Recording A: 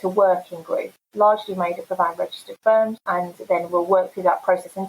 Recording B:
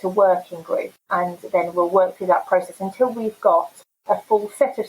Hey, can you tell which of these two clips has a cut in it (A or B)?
B